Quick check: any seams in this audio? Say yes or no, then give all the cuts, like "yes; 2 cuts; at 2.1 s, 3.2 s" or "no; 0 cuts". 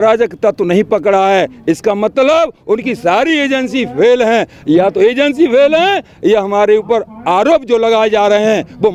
no; 0 cuts